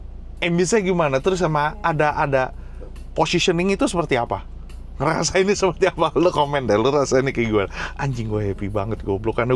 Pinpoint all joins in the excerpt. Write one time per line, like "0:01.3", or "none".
none